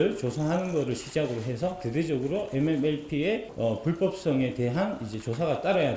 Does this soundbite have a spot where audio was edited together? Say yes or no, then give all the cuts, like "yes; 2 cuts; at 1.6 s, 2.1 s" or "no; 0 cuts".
yes; 1 cut; at 3.5 s